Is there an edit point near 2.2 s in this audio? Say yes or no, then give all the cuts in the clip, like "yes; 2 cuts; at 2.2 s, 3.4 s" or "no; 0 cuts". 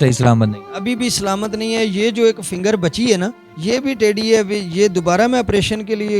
no; 1 cut; at 3.5 s